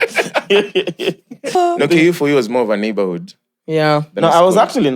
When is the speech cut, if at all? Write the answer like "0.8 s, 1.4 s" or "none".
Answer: 1.5 s